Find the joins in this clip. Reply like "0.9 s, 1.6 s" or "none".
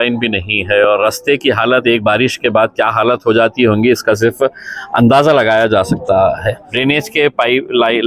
6.7 s

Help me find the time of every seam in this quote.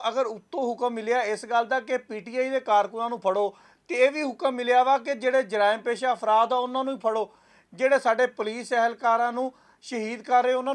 none

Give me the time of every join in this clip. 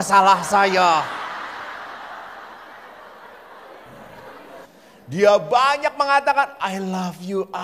4.7 s

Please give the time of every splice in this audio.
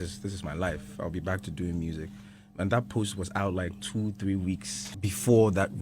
4.8 s

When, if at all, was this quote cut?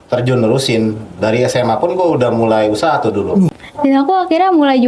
3.6 s

